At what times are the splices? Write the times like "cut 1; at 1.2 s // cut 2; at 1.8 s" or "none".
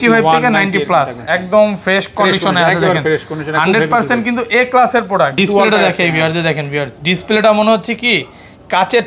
cut 1; at 5.3 s